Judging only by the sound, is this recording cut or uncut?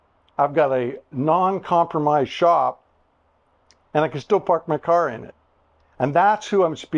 uncut